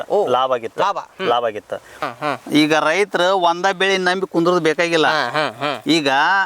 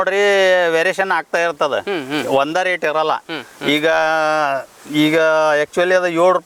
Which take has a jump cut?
first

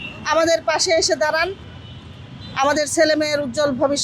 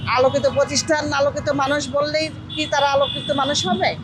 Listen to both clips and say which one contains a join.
first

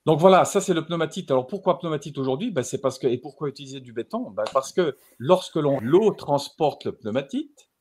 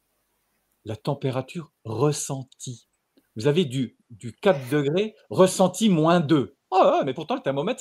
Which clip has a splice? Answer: first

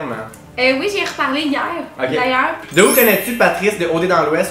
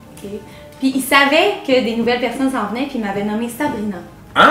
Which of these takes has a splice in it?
first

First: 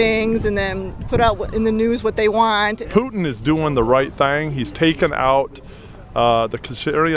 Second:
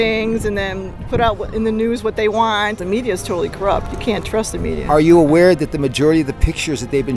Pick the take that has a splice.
first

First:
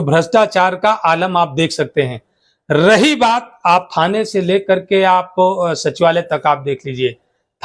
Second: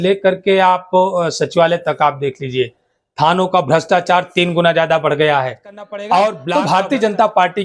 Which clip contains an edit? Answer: second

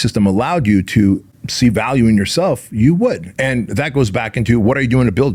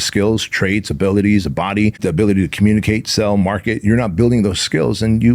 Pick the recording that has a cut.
second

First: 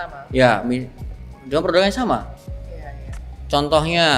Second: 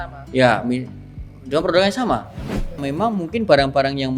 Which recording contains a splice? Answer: second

